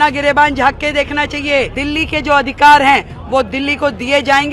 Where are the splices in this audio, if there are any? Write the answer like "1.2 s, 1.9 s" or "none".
1.8 s